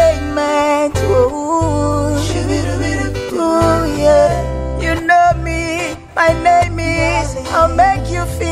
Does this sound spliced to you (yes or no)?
no